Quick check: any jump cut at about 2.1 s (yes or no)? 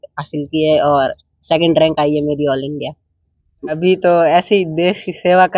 no